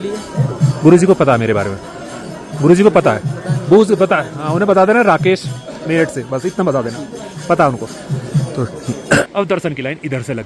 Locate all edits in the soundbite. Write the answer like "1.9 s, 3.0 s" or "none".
9.2 s